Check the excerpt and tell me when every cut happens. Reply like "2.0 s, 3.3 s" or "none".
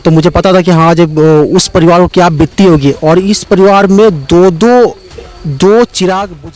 none